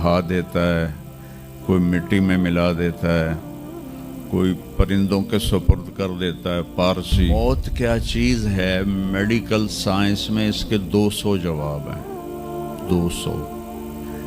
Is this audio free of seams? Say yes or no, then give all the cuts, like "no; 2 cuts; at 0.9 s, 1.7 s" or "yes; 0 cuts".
no; 1 cut; at 7.3 s